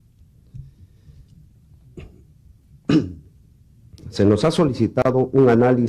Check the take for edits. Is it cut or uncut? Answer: cut